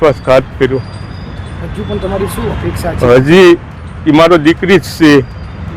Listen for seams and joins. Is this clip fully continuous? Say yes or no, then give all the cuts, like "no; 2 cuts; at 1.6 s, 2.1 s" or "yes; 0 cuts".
yes; 0 cuts